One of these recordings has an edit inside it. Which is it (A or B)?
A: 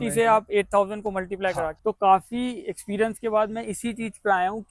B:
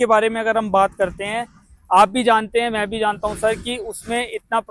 A